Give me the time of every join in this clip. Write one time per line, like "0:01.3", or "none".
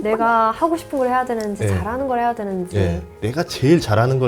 0:03.0